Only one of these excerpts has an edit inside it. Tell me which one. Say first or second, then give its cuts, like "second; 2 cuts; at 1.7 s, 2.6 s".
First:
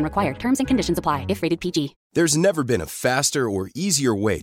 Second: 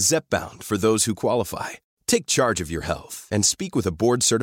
first; 1 cut; at 2.0 s